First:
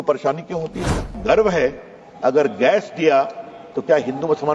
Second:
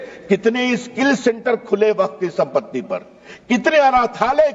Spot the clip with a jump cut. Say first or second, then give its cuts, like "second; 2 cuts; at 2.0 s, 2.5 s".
first; 1 cut; at 1.1 s